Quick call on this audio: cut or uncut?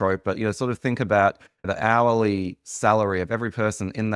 uncut